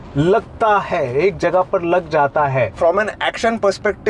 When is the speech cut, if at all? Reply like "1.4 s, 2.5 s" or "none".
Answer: 2.8 s